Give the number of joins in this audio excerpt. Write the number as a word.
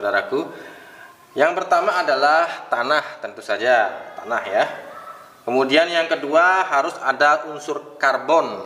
zero